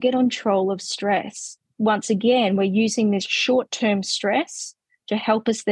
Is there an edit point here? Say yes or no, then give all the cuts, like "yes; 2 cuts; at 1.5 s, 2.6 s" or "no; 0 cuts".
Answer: yes; 1 cut; at 1.6 s